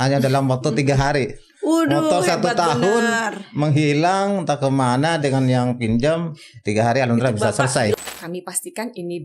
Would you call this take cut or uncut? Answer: cut